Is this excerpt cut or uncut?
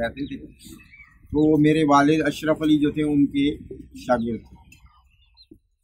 uncut